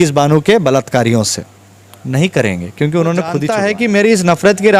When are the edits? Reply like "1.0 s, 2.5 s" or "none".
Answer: 3.5 s